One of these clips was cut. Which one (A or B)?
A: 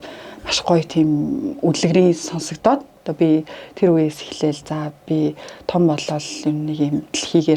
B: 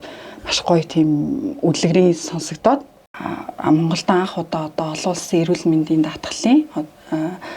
B